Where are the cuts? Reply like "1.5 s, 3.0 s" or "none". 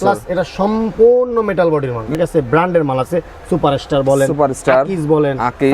2.2 s